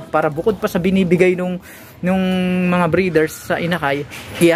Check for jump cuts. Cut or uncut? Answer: uncut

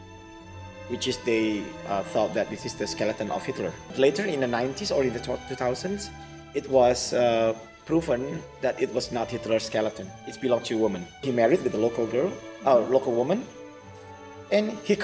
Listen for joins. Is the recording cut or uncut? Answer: cut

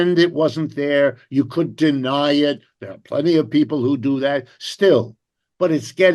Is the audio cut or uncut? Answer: uncut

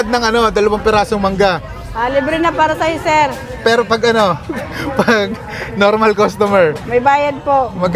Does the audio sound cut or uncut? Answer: uncut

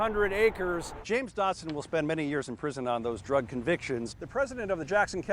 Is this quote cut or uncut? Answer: cut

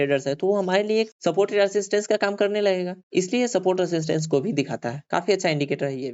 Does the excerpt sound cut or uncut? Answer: uncut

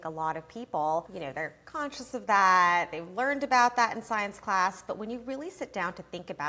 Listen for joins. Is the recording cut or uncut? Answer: cut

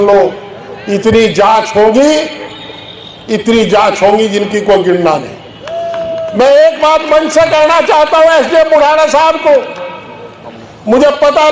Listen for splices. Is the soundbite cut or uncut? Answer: uncut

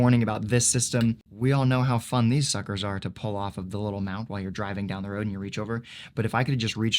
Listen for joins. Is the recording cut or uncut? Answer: cut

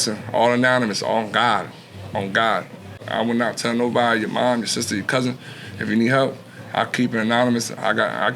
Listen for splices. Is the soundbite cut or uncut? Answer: cut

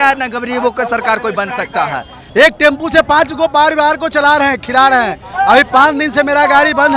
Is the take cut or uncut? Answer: cut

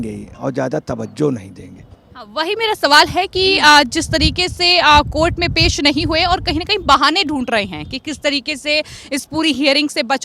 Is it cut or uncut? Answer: uncut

